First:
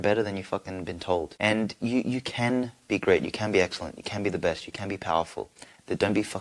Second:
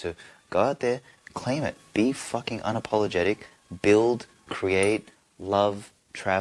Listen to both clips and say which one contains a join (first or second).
first